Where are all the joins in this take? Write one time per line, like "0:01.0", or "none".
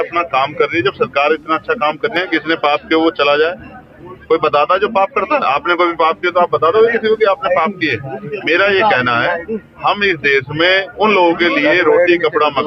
0:02.2